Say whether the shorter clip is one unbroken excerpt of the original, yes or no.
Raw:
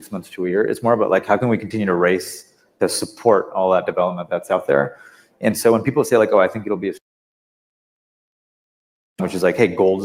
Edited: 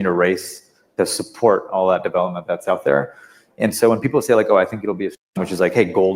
no